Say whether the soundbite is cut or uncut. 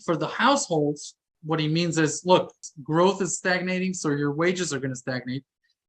cut